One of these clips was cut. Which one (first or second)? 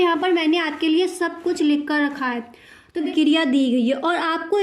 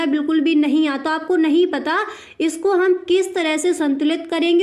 first